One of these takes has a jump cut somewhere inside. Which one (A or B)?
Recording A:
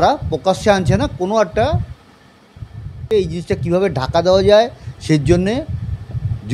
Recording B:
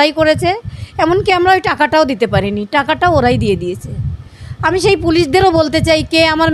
A